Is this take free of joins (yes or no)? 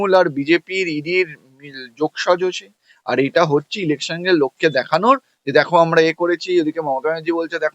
yes